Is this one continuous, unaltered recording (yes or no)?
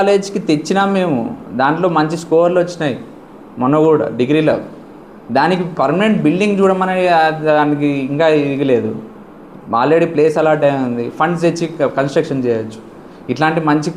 yes